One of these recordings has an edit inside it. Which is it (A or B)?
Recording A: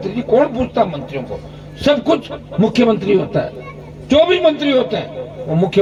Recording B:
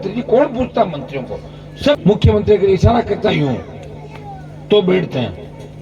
B